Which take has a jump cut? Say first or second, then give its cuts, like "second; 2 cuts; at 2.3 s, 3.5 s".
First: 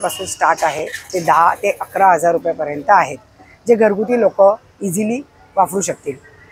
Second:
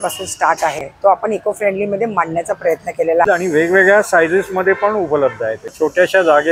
second; 3 cuts; at 0.9 s, 3.2 s, 5.7 s